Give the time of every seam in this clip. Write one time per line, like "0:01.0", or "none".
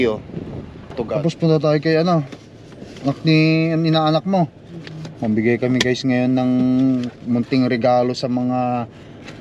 0:01.1